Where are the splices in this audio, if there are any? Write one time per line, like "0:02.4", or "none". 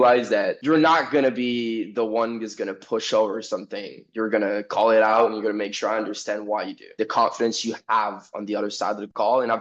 0:06.9